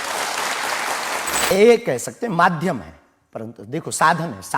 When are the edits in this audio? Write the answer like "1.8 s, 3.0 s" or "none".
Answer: 1.5 s